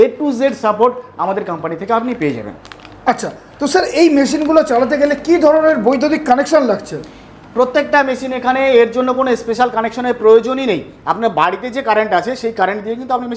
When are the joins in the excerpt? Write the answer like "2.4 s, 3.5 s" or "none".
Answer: none